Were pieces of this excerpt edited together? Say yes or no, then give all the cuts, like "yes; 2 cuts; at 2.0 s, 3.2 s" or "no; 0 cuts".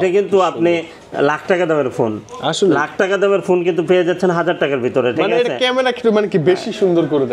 no; 0 cuts